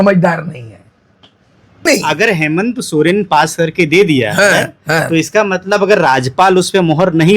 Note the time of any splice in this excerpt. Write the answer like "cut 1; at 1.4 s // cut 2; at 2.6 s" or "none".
cut 1; at 1.9 s

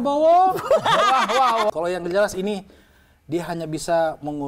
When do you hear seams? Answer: cut 1; at 1.7 s

